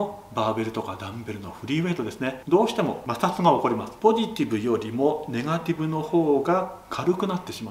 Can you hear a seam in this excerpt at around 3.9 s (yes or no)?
yes